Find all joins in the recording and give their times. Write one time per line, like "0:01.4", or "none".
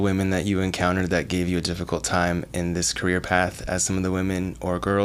none